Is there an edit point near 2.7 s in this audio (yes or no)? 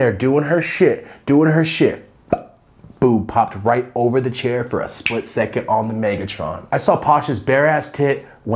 no